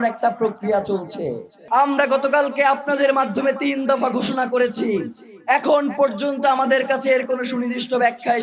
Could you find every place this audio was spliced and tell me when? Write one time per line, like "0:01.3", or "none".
0:01.5